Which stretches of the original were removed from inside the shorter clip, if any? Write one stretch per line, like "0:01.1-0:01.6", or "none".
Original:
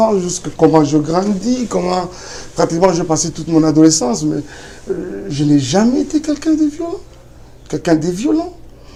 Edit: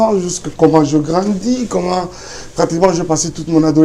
none